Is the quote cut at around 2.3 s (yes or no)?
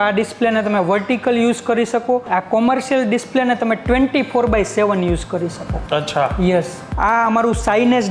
yes